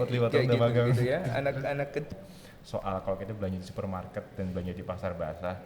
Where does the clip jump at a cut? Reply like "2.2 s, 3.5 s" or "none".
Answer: 2.1 s